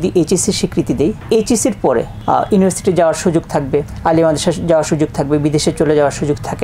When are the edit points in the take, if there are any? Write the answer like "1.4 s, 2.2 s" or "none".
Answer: 3.9 s